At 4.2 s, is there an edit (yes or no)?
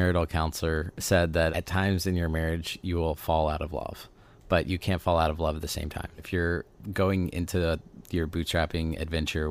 no